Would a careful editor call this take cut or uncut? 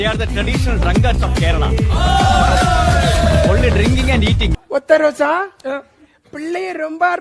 uncut